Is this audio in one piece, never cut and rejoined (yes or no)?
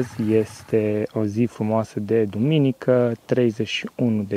yes